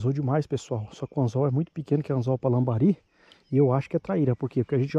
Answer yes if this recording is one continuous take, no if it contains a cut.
yes